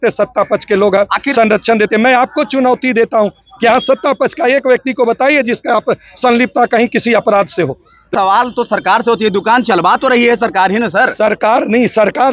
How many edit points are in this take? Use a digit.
1